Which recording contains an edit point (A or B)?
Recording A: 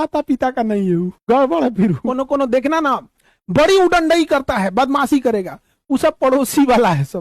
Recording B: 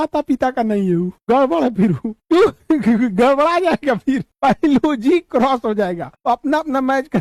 A